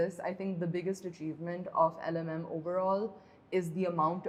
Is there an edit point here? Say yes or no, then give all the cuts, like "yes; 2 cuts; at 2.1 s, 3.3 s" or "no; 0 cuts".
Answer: no; 0 cuts